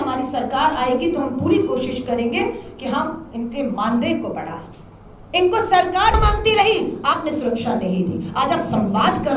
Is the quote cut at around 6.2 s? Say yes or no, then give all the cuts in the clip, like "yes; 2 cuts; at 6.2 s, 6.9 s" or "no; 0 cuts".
yes; 1 cut; at 6.2 s